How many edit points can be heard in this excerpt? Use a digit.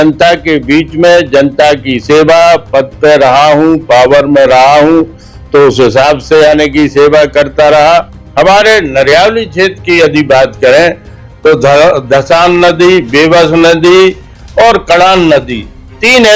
1